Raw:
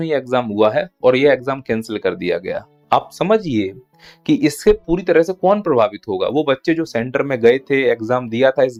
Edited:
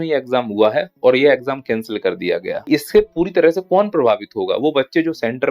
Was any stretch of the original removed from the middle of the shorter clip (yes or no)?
yes